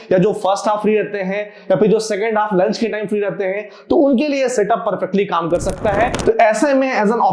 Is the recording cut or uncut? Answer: cut